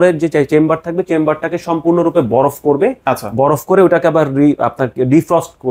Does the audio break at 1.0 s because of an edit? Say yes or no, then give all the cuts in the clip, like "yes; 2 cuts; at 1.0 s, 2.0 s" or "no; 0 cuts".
no; 0 cuts